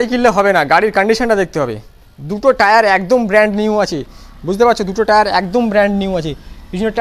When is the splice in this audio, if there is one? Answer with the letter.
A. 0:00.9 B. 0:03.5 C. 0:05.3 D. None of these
D